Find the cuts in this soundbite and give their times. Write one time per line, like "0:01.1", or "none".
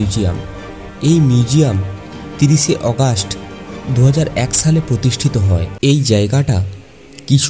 0:05.7